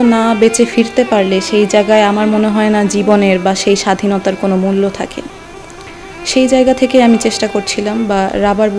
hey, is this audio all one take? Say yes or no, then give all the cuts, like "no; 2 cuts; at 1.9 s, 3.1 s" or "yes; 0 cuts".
yes; 0 cuts